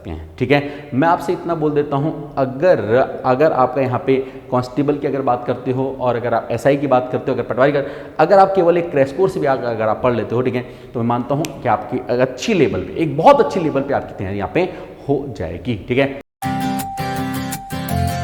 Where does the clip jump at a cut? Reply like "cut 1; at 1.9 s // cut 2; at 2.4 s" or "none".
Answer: cut 1; at 16.2 s

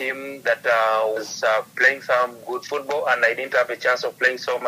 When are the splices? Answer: none

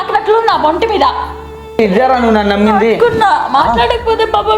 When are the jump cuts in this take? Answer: cut 1; at 1.8 s

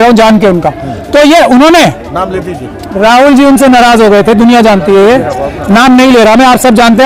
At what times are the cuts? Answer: none

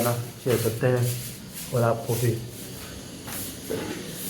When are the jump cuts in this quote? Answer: cut 1; at 2.6 s

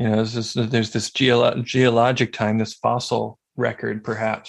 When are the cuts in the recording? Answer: cut 1; at 3.4 s

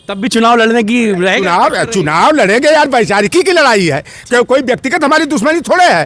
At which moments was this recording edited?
none

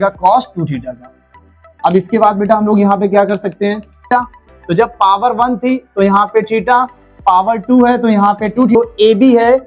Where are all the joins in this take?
cut 1; at 4.1 s // cut 2; at 8.7 s

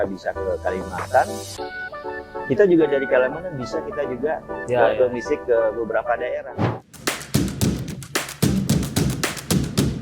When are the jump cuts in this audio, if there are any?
cut 1; at 6.5 s

